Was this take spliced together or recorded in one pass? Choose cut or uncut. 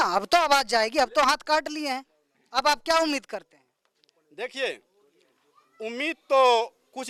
uncut